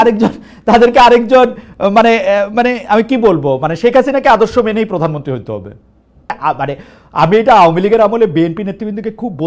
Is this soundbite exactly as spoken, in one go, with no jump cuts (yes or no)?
no